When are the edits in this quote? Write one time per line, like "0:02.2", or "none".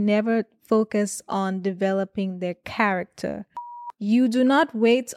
0:03.8